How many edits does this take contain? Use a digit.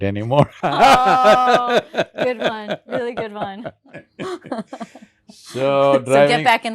1